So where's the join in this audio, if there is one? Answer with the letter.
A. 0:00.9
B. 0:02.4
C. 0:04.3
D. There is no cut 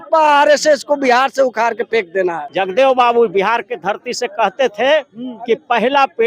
B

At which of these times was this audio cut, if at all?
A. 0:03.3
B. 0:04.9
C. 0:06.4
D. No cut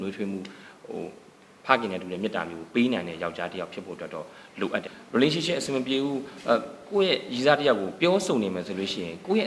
B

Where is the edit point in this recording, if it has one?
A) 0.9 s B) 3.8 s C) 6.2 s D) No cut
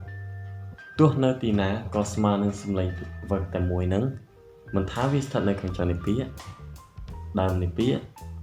A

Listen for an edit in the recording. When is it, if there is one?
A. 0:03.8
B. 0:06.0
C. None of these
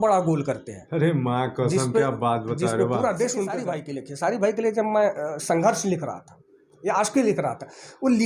A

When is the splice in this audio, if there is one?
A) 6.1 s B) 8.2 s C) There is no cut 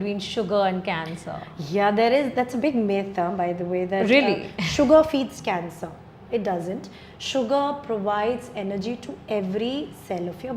C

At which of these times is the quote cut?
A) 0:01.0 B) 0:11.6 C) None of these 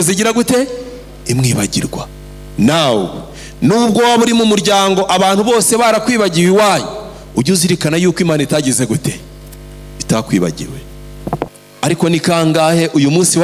B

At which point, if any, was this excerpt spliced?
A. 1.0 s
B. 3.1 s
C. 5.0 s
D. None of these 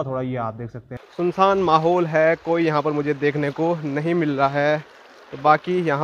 A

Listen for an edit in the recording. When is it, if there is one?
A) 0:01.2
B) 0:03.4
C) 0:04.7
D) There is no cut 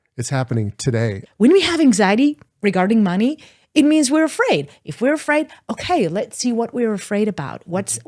A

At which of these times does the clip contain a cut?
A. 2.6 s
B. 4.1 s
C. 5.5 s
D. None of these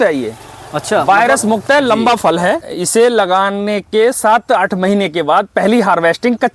A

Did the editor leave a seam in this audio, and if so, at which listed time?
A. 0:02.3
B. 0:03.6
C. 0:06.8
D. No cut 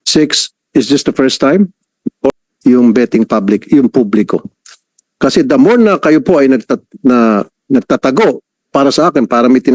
A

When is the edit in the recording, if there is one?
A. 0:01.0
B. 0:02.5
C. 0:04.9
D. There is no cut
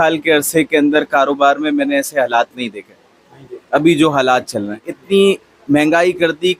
C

